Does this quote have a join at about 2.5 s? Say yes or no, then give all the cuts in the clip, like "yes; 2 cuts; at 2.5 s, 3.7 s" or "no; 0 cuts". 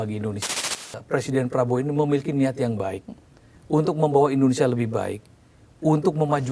no; 1 cut; at 0.9 s